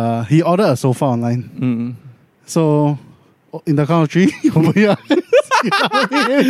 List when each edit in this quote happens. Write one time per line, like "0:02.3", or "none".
none